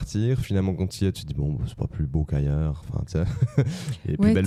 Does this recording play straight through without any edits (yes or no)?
yes